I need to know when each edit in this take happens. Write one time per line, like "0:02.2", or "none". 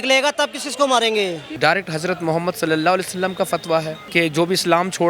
0:01.5